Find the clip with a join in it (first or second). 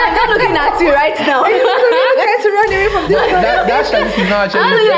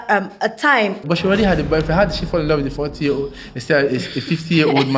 second